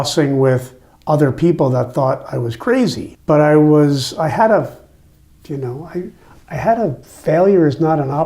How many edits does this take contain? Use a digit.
1